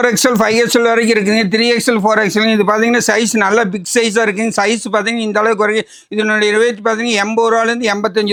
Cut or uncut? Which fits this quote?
uncut